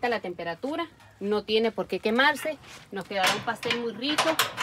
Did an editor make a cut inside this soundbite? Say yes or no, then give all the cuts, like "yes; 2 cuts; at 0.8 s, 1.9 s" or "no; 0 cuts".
no; 0 cuts